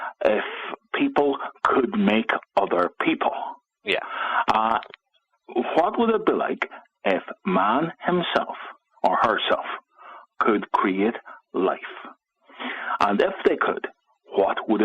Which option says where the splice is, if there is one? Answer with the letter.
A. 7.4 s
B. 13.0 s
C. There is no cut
B